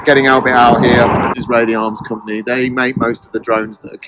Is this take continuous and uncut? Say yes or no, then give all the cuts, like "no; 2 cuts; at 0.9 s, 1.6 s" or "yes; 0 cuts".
no; 1 cut; at 1.4 s